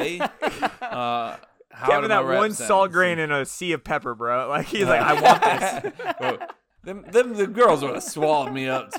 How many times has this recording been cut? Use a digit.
1